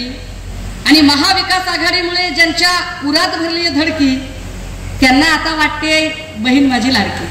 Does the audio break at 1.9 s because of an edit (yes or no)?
no